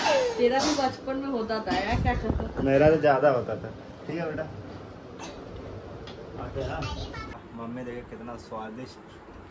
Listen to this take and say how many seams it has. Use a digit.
1